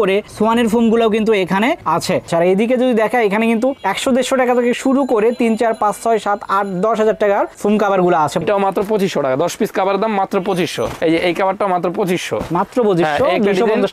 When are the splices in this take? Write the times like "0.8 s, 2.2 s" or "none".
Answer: 2.2 s, 8.4 s

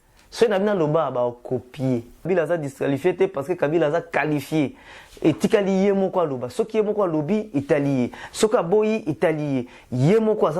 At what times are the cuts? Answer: 2.3 s

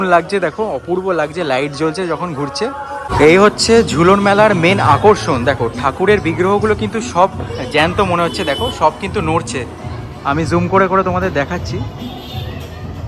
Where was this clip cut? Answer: 3.1 s

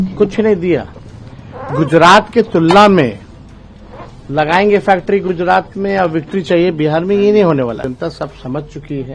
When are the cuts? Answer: 7.8 s

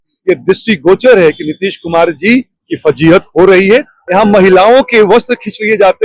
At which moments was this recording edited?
3.9 s

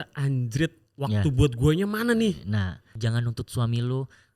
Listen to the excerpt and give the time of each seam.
2.9 s

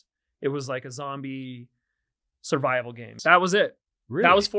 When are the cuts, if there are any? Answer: 3.1 s

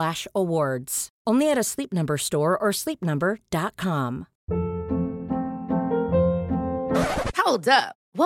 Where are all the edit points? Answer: 4.3 s

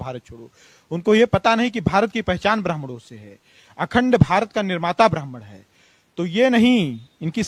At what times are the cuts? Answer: none

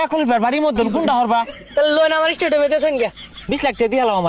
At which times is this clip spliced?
1.6 s, 3.3 s

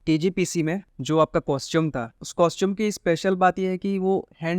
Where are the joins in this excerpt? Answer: 0.9 s, 2.2 s

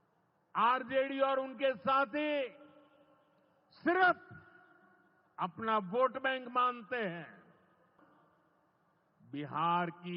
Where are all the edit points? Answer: 8.0 s

